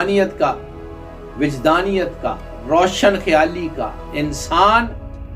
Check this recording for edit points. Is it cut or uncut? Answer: uncut